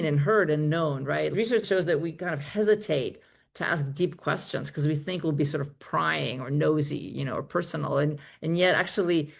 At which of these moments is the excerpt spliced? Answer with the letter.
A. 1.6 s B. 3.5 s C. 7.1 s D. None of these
A